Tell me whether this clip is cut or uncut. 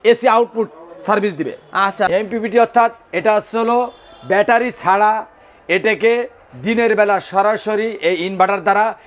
cut